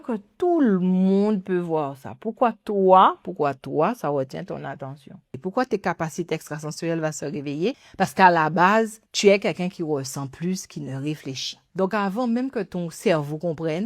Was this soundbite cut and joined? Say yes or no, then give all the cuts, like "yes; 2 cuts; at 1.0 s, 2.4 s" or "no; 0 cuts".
yes; 4 cuts; at 5.4 s, 7.8 s, 9.0 s, 11.6 s